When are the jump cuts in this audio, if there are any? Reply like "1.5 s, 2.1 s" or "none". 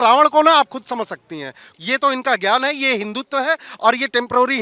1.7 s